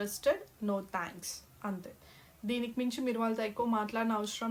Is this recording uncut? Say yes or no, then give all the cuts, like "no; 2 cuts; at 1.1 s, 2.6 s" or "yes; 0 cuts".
yes; 0 cuts